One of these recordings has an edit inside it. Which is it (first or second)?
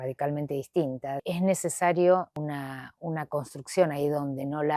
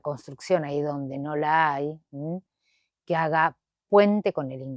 first